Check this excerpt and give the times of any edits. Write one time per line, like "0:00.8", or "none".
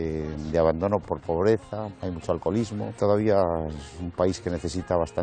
0:01.1
0:01.9
0:02.9